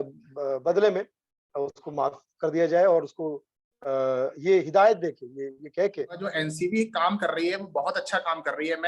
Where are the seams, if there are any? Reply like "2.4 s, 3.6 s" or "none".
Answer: 6.2 s